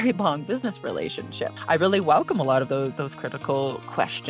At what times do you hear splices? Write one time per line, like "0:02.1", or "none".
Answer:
none